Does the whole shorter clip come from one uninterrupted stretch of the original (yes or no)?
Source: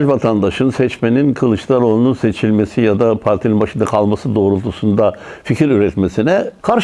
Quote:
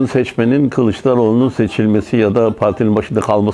yes